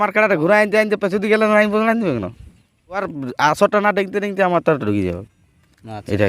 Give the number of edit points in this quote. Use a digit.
1